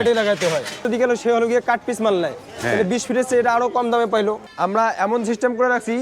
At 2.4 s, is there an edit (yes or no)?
no